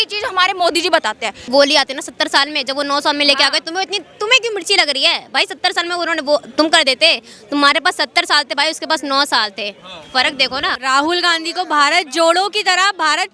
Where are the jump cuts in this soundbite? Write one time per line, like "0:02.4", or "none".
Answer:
0:01.4
0:10.8

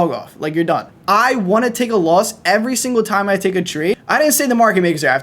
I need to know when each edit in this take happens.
0:00.9
0:04.0

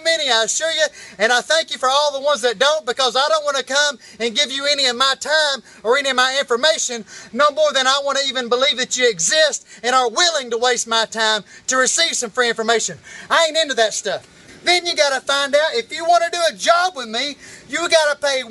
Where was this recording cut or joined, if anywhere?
0:14.4

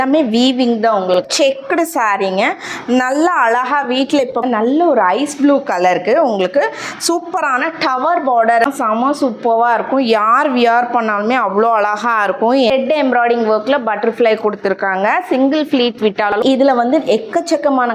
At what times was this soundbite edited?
0:01.2
0:04.4
0:08.6
0:12.7
0:16.4

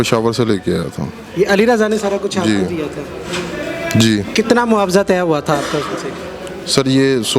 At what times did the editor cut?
none

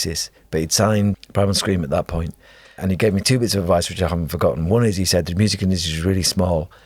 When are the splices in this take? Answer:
0:01.1
0:02.8

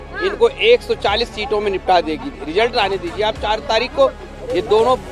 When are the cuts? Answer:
none

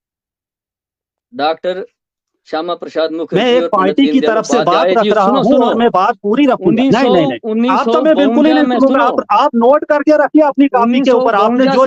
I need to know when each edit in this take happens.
none

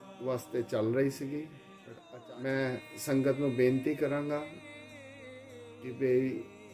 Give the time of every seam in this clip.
0:01.8

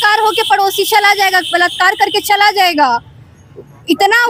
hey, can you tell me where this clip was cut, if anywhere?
none

